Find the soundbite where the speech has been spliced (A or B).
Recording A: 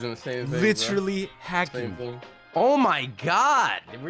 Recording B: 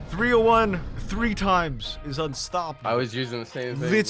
A